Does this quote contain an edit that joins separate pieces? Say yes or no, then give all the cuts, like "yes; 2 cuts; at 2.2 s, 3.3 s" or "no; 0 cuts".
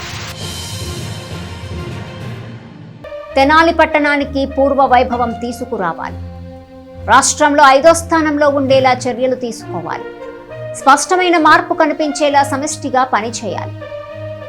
yes; 1 cut; at 3.3 s